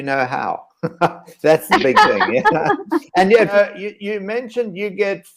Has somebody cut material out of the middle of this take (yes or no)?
yes